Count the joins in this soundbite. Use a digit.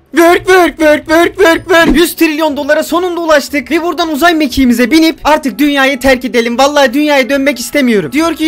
1